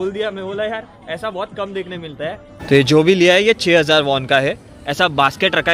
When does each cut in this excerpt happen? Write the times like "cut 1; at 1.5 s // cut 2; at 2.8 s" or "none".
cut 1; at 2.5 s